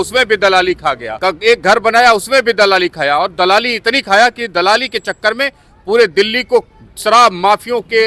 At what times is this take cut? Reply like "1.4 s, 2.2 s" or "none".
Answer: 1.1 s